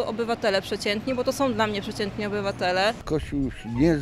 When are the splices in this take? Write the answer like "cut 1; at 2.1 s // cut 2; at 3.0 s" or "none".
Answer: cut 1; at 3.1 s